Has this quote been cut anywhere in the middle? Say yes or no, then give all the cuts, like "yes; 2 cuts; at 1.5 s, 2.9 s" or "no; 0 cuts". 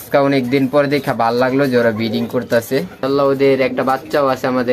yes; 1 cut; at 3.0 s